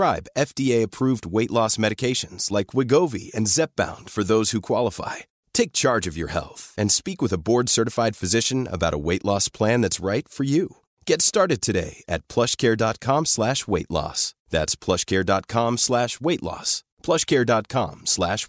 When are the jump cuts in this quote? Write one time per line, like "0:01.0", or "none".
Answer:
none